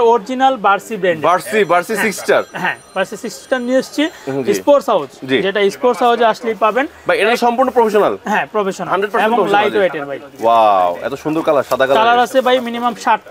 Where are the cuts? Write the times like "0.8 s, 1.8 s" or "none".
none